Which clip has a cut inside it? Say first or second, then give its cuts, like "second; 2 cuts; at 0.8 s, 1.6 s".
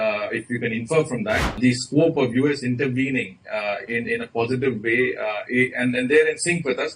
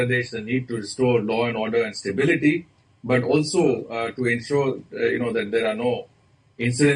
first; 1 cut; at 1.6 s